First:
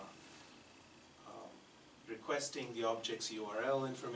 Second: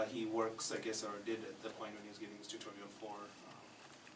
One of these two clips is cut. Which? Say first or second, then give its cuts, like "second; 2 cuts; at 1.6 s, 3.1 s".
second; 1 cut; at 1.4 s